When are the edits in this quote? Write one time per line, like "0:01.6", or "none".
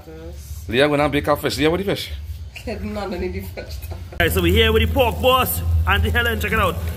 0:04.1